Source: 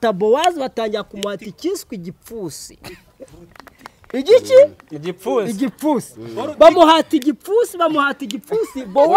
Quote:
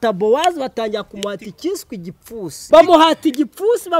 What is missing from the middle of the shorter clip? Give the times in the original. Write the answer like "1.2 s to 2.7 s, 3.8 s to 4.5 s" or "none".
2.6 s to 6.5 s